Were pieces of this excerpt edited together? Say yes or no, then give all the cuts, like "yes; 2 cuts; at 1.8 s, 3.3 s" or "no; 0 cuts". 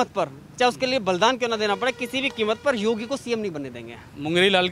no; 0 cuts